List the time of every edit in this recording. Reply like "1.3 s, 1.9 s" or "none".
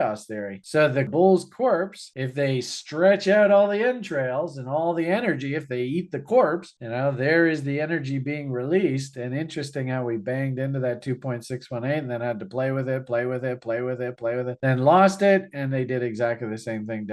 1.1 s